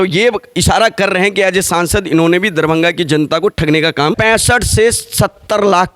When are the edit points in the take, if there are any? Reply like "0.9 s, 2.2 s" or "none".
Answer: 4.2 s